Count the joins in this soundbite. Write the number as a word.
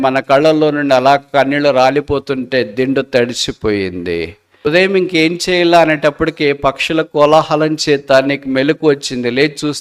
one